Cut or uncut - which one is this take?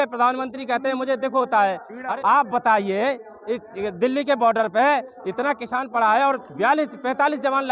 cut